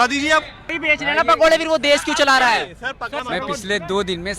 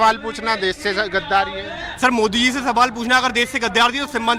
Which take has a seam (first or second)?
first